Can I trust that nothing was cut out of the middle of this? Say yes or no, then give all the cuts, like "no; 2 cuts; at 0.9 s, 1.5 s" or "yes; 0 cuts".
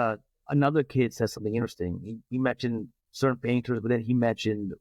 yes; 0 cuts